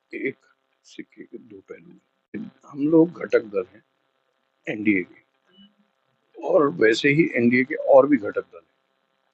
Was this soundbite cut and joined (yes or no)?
yes